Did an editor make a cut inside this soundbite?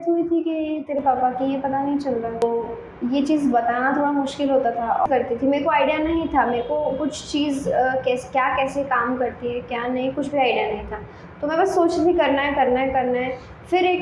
yes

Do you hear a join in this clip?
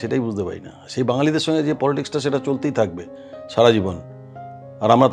no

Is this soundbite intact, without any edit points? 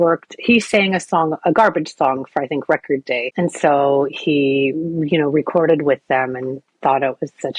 no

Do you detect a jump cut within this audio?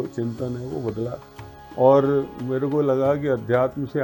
no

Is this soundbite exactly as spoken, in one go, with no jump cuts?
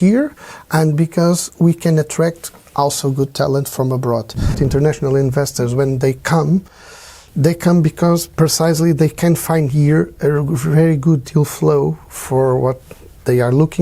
no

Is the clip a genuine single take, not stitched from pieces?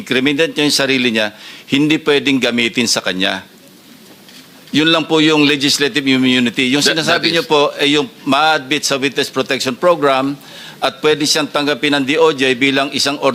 yes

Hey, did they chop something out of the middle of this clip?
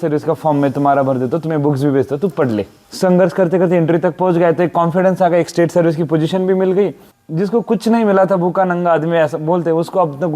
yes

